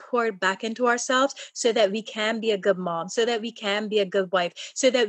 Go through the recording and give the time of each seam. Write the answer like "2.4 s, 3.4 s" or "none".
none